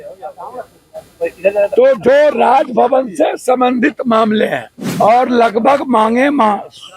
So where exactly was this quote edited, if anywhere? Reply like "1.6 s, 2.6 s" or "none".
4.8 s